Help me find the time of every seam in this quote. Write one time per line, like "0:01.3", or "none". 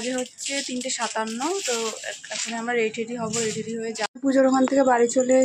0:04.3